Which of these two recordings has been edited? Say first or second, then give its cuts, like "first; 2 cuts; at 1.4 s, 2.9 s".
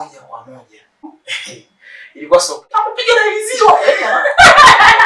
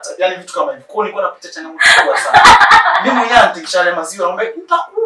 first; 2 cuts; at 1.0 s, 2.7 s